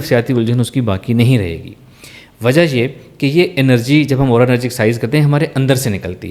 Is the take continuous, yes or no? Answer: yes